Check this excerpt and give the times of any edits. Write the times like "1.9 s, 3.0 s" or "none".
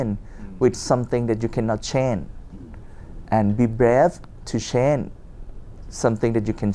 none